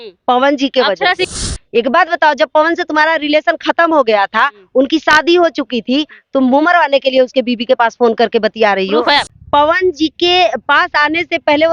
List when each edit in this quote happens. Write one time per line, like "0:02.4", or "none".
0:01.2
0:09.4